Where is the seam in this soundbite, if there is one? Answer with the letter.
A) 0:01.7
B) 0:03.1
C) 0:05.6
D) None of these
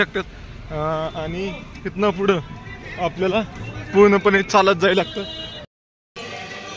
C